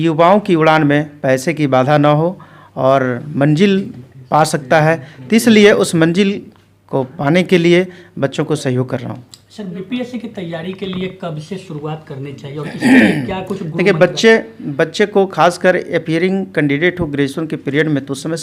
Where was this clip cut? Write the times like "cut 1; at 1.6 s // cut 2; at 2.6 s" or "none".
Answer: none